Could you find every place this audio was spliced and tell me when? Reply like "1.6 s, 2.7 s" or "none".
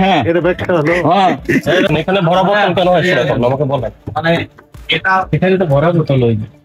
1.9 s